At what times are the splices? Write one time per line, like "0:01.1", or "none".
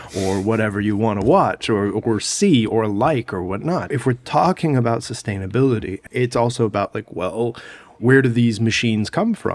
0:04.0
0:06.0